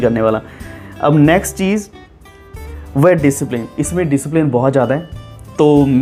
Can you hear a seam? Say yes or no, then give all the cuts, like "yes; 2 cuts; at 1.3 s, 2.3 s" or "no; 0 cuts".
no; 0 cuts